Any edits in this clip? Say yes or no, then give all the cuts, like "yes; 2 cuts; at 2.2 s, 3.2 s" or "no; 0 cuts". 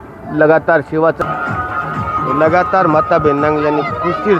yes; 1 cut; at 1.2 s